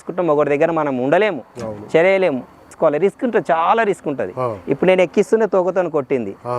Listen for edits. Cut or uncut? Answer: cut